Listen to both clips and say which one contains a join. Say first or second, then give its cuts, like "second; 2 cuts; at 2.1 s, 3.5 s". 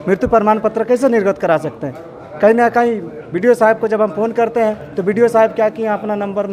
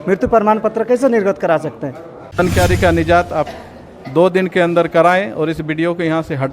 second; 1 cut; at 2.4 s